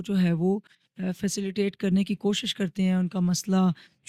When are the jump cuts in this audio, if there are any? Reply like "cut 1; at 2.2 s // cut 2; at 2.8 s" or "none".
none